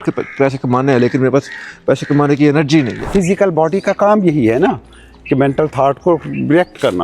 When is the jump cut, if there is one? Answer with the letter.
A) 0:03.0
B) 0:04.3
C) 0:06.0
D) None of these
A